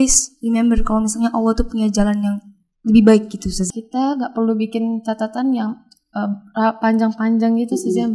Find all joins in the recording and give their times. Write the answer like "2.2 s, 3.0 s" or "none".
3.7 s